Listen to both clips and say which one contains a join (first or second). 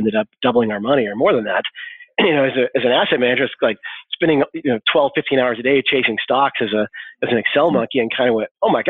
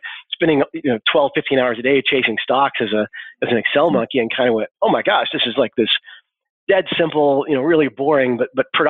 first